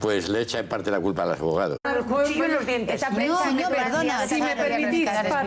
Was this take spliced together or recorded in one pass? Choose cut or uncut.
uncut